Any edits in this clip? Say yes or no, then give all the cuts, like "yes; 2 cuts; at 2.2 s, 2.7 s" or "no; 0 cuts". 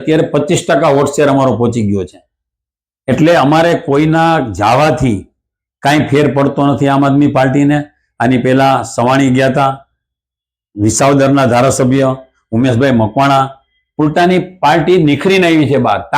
no; 0 cuts